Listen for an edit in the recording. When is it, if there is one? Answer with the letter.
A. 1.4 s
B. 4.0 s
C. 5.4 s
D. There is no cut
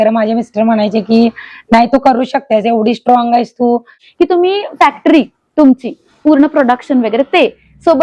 B